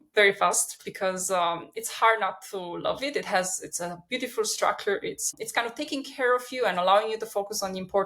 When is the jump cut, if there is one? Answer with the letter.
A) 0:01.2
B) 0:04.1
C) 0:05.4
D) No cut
C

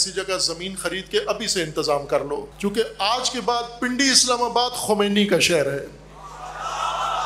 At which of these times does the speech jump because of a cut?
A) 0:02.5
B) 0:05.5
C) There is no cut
A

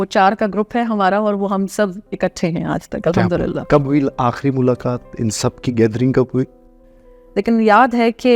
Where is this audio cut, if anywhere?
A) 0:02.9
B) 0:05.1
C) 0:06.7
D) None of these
C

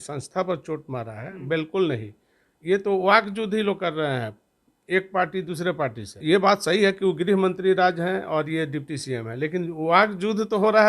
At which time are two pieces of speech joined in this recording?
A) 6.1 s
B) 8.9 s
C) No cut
A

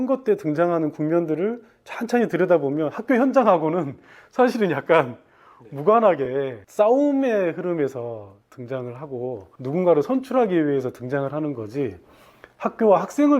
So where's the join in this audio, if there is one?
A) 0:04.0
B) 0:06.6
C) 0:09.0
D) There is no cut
B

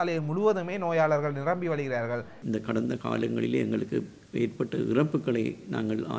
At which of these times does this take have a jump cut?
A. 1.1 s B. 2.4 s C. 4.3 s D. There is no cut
B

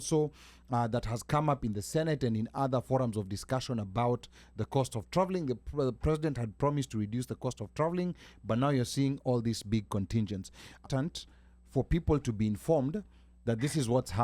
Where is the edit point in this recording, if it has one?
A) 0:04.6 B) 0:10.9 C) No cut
B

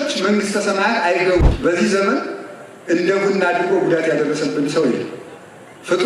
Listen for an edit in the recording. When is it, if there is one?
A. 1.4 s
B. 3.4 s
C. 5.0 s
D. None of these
A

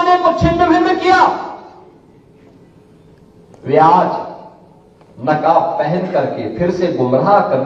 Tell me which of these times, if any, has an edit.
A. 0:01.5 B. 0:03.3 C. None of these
C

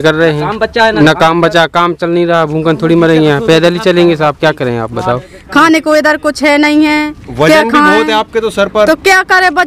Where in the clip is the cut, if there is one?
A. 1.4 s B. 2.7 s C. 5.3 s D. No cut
C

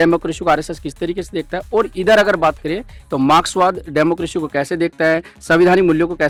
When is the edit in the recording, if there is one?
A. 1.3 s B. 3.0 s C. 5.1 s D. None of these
D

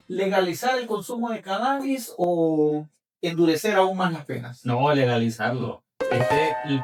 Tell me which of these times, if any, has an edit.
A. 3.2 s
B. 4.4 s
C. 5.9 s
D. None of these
D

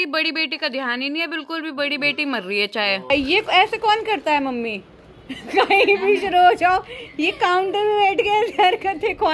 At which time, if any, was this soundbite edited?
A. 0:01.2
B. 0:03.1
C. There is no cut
B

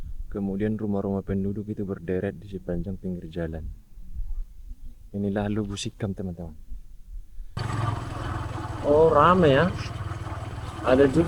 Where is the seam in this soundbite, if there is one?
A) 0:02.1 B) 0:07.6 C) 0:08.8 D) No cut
B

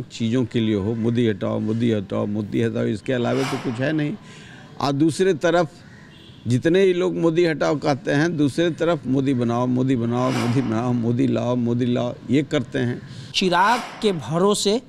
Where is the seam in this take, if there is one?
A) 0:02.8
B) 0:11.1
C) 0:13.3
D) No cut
C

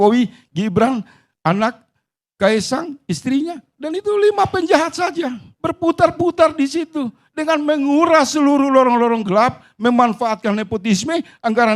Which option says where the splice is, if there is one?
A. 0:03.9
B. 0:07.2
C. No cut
C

